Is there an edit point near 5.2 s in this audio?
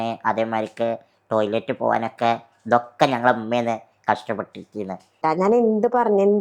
yes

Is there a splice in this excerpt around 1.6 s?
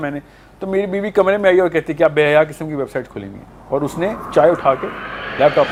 no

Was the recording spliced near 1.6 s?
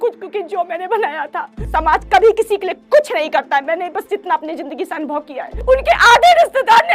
yes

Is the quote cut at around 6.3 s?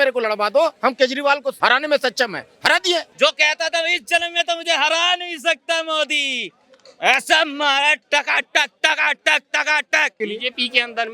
no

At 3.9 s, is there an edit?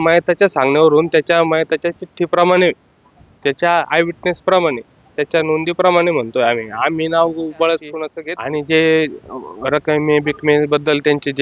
no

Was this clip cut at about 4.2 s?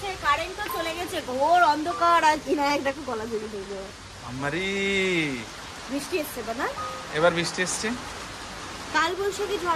no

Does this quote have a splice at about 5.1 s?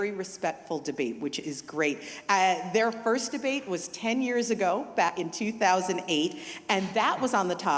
yes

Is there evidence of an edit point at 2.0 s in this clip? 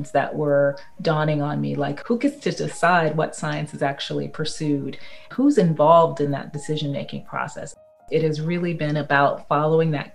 yes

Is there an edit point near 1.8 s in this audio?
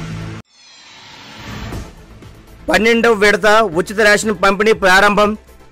yes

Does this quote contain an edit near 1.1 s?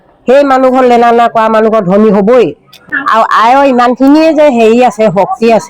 no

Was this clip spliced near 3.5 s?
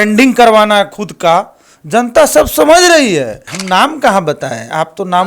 yes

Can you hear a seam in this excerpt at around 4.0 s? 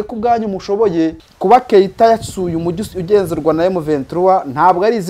no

